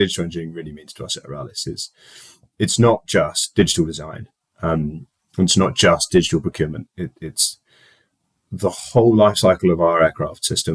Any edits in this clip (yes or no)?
no